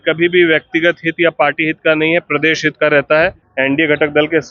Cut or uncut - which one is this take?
cut